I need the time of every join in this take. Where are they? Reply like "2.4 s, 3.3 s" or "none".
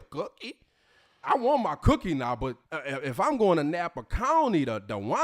1.2 s